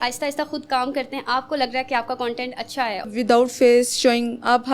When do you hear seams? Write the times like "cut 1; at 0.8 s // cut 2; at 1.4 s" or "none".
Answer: cut 1; at 3.1 s

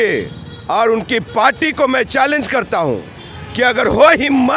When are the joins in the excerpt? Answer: none

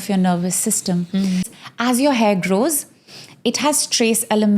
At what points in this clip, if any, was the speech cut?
cut 1; at 1.6 s

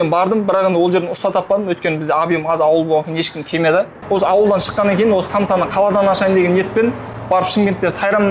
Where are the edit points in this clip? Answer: cut 1; at 4.0 s

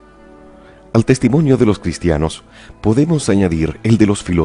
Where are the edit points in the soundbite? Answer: none

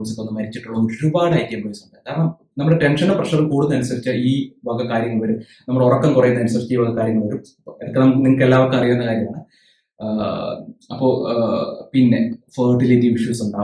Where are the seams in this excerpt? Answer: none

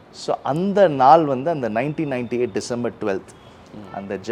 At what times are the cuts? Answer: none

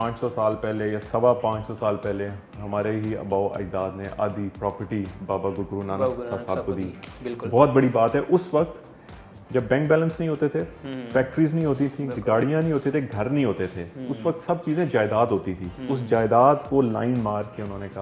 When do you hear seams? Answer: none

